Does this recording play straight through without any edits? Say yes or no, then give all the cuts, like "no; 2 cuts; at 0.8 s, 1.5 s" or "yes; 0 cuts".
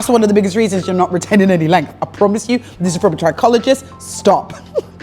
yes; 0 cuts